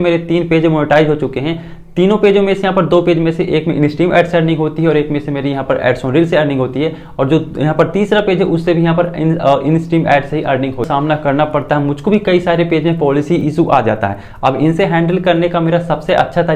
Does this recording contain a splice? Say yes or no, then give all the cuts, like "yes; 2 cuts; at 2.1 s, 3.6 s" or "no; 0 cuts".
yes; 1 cut; at 10.9 s